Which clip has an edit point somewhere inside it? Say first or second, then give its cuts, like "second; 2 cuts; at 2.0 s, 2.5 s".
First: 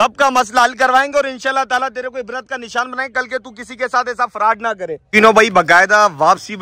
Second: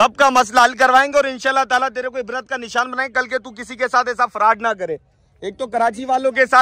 first; 1 cut; at 5.0 s